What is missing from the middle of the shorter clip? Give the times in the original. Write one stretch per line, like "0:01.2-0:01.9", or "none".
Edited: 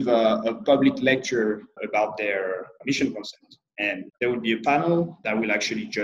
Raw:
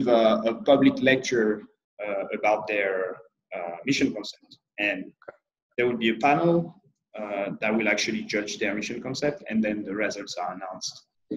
0:01.8-0:02.3
0:03.3-0:03.8
0:05.1-0:05.6
0:06.8-0:07.6